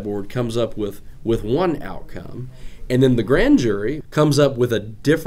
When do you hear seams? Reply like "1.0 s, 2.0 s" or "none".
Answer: 4.0 s